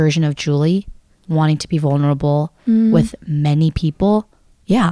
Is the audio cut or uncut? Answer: uncut